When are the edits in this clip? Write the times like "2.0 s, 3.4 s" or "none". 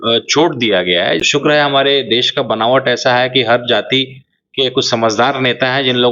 1.2 s

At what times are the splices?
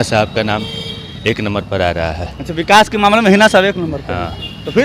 none

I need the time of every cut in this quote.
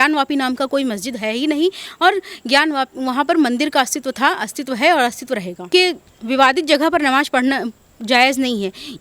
5.7 s

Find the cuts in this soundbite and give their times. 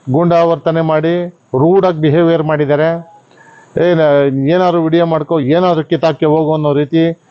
none

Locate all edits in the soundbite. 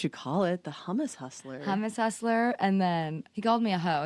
none

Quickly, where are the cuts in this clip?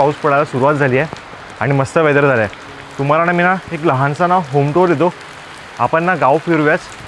none

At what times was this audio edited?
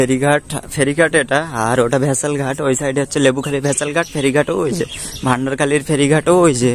none

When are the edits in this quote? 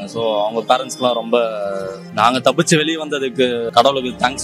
2.0 s

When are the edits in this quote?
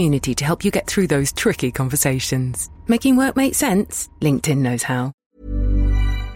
5.2 s

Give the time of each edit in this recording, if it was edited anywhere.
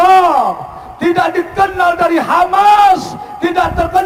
none

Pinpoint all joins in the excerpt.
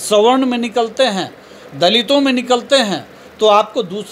none

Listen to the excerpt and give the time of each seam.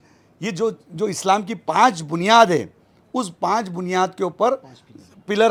none

